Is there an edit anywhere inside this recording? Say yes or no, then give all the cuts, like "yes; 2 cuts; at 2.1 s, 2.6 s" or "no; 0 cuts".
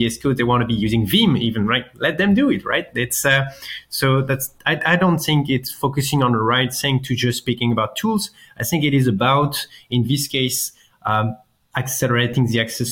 no; 0 cuts